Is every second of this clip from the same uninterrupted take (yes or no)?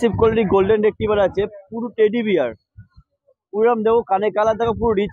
yes